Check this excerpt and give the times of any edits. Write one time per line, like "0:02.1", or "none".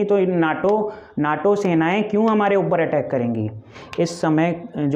0:03.8